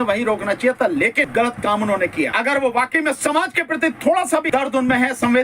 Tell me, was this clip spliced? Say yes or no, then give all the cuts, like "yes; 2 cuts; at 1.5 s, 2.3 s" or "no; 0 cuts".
yes; 3 cuts; at 1.3 s, 2.3 s, 4.5 s